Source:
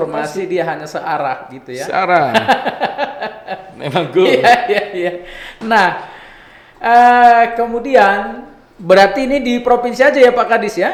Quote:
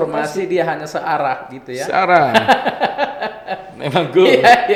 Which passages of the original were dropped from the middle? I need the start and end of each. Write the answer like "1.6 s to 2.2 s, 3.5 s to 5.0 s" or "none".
none